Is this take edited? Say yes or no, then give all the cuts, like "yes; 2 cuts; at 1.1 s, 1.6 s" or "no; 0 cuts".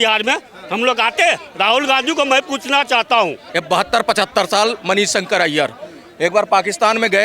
yes; 1 cut; at 3.4 s